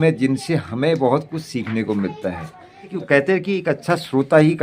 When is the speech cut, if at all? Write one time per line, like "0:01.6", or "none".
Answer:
0:02.9

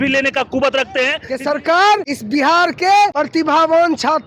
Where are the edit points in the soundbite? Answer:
0:01.2
0:02.1
0:03.2

